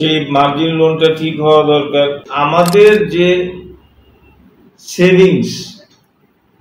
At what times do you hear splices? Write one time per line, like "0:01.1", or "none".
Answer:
0:02.3